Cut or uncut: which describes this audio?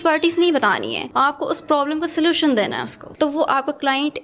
cut